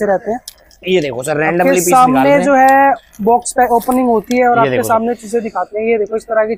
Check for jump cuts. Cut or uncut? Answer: uncut